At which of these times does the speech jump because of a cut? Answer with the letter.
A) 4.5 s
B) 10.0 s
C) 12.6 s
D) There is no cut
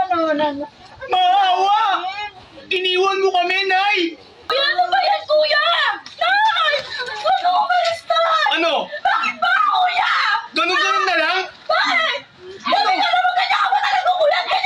A